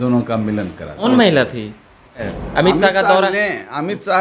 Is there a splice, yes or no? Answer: yes